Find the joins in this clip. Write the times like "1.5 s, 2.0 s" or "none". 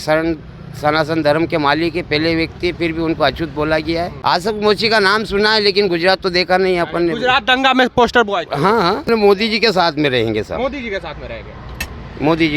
4.1 s, 9.0 s